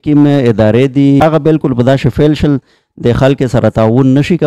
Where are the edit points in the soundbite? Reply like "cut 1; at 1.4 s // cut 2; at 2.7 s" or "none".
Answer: cut 1; at 1.2 s